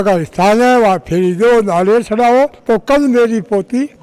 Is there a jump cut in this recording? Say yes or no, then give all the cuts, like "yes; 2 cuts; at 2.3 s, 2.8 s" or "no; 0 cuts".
no; 0 cuts